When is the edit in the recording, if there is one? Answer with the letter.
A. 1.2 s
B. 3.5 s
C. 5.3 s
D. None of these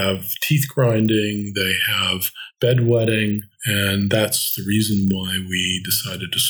B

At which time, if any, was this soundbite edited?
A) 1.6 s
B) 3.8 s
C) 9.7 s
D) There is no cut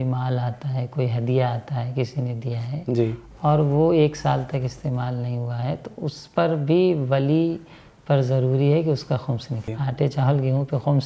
C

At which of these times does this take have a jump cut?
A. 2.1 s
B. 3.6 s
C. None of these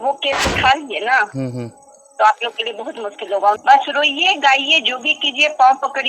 B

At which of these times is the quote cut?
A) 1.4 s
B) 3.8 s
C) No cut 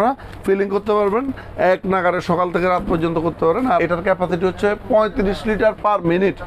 B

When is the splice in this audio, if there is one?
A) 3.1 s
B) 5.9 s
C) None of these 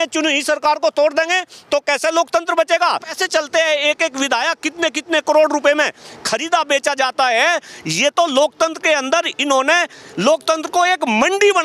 A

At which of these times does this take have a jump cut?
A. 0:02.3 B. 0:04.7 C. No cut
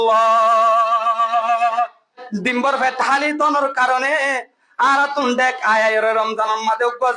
A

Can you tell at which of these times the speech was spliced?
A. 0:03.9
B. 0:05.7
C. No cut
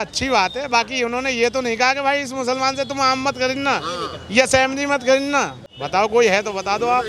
C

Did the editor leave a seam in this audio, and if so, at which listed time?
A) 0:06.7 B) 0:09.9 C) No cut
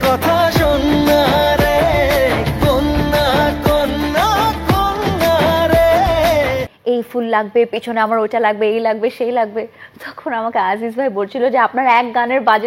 A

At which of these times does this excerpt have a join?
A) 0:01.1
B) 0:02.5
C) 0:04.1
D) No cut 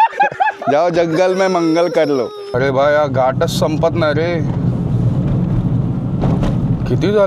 B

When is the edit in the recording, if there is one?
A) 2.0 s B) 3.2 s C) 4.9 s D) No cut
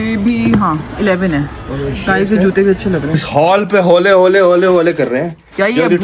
B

